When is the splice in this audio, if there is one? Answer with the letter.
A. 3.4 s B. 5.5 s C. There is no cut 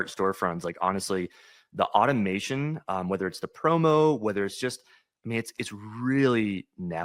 C